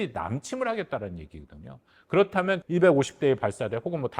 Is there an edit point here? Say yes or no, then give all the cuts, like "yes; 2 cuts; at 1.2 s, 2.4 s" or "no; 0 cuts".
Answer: yes; 1 cut; at 2.6 s